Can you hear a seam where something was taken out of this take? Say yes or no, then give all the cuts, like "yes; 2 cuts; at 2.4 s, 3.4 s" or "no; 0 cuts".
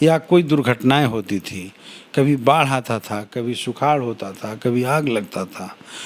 no; 0 cuts